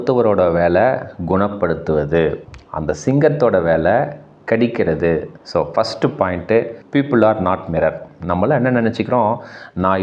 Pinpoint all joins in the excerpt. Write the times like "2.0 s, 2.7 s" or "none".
5.4 s, 8.1 s